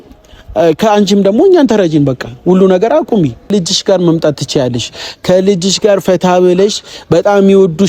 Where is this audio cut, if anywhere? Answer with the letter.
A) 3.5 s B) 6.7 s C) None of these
A